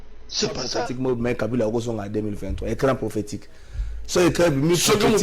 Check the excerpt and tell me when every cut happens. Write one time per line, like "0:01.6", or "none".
0:00.9